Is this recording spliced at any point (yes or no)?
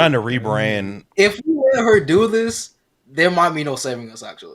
yes